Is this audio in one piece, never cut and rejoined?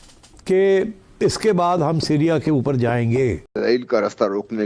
no; 1 cut; at 3.6 s

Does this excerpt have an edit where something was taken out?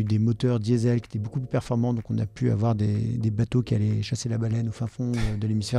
no; 0 cuts

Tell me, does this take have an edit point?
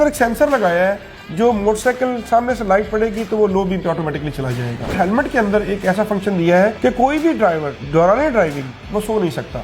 yes; 3 cuts; at 4.9 s, 6.8 s, 7.7 s

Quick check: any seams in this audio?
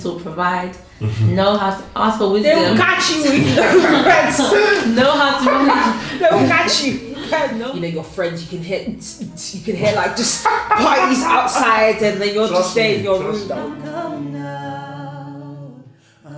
yes; 2 cuts; at 7.6 s, 13.5 s

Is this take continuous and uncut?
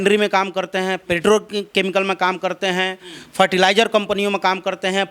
yes; 0 cuts

